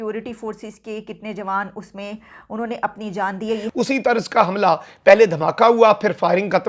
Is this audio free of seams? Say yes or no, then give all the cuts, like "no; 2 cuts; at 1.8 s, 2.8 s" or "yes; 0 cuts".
no; 1 cut; at 3.7 s